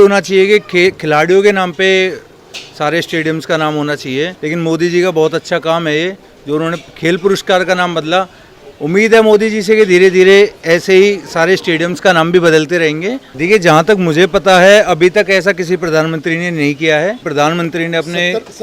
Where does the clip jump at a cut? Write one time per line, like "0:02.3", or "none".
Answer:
0:04.4
0:13.3
0:17.2

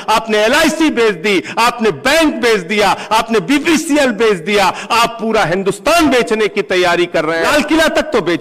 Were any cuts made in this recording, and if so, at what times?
0:07.5

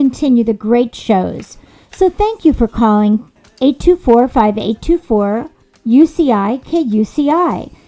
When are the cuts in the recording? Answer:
none

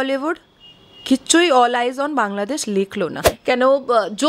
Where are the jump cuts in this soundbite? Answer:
0:03.3

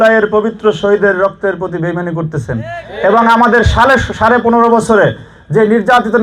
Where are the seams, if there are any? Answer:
none

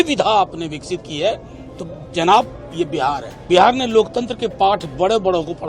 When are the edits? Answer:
0:03.3

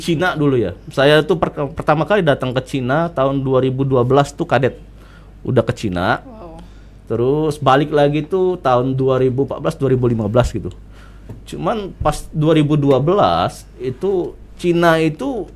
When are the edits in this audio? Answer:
none

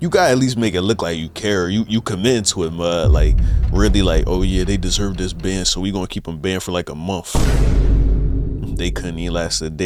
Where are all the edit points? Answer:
none

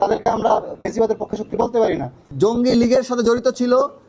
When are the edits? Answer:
0:02.2

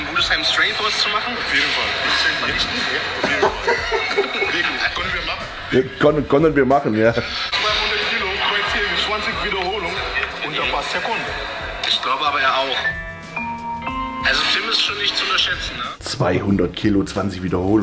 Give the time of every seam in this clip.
0:07.5
0:15.8

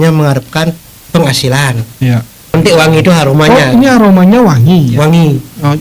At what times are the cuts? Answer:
0:02.5

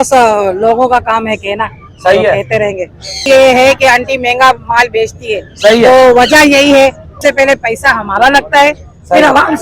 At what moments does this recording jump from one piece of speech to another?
0:03.1
0:07.1

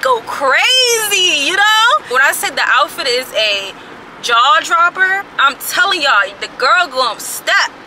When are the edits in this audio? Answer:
0:02.1
0:05.3

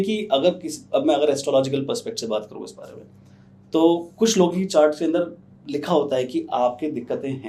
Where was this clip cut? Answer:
none

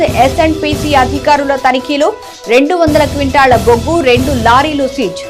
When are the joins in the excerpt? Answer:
none

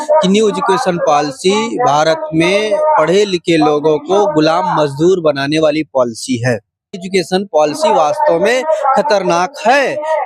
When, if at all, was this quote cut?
0:06.9

